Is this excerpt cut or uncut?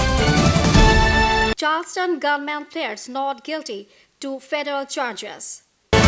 cut